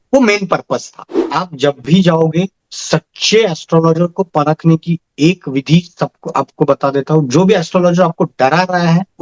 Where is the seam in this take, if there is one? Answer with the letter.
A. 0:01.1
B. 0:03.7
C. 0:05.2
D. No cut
A